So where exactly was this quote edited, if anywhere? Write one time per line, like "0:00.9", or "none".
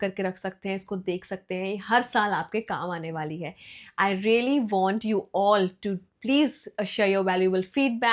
none